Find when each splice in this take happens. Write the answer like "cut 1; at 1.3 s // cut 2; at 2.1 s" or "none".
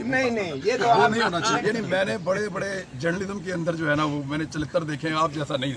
cut 1; at 1.6 s